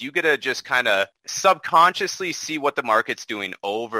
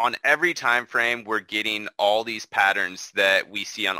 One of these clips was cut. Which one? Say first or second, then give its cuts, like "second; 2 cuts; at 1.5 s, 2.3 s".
first; 1 cut; at 1.2 s